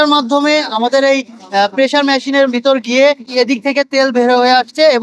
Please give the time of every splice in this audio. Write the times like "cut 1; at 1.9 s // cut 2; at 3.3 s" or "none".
cut 1; at 3.3 s

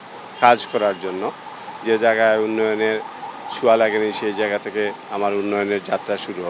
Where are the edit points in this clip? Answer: none

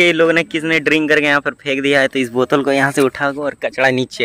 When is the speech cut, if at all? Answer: cut 1; at 2.1 s

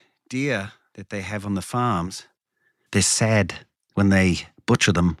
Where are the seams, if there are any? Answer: none

